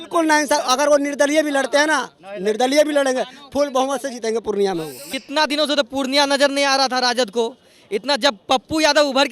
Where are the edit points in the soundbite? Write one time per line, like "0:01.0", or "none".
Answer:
0:05.2